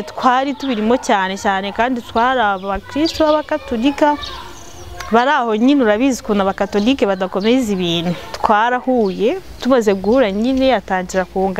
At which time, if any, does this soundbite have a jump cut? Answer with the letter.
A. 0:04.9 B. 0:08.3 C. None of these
B